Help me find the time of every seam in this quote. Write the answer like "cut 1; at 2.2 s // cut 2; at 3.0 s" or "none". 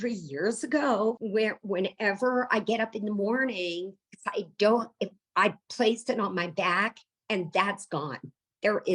cut 1; at 1.2 s